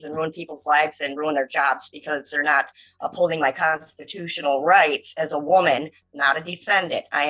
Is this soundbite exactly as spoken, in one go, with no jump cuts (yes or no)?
yes